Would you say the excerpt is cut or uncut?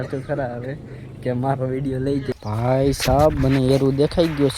cut